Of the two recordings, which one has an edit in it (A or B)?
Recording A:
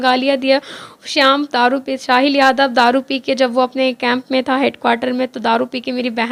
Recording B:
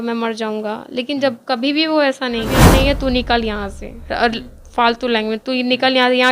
B